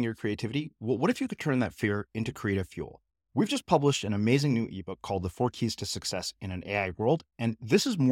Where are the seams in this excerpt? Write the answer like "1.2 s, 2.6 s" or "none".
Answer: none